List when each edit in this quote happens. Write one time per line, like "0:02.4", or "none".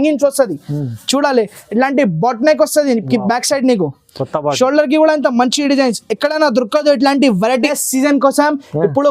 0:07.8